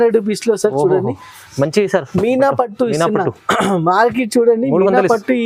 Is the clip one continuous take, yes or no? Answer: yes